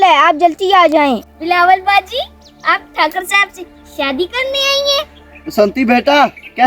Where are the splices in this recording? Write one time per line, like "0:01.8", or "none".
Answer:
0:01.2